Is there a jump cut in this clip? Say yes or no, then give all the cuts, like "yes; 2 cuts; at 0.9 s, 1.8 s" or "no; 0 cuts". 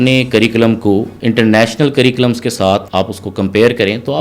yes; 2 cuts; at 1.1 s, 2.9 s